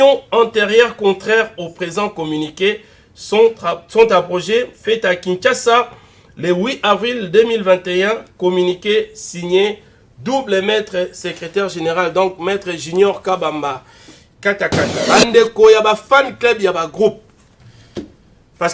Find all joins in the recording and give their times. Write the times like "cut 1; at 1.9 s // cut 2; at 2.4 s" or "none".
cut 1; at 15.0 s